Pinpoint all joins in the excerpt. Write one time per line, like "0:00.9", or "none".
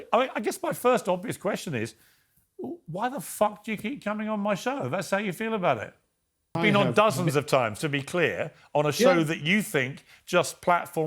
0:06.5